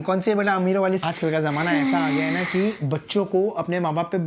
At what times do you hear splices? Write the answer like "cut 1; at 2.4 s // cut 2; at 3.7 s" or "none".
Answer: cut 1; at 1.0 s